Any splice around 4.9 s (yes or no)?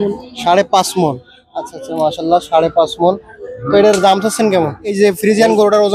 yes